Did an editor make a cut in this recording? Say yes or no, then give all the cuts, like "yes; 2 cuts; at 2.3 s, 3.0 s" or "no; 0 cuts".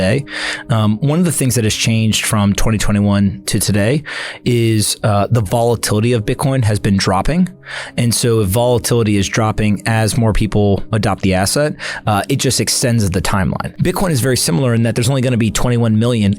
yes; 1 cut; at 13.7 s